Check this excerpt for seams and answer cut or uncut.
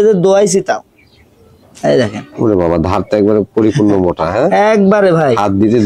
uncut